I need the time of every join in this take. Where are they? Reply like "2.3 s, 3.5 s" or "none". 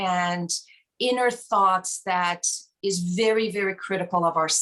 none